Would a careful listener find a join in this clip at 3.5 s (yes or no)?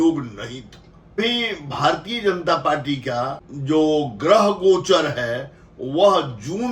yes